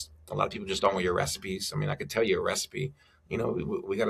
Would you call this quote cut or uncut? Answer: uncut